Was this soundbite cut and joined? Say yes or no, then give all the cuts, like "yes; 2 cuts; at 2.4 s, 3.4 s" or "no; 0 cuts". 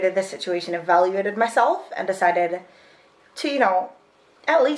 no; 0 cuts